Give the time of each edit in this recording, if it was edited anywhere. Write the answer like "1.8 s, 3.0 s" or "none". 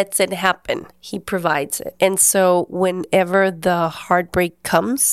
1.0 s, 1.9 s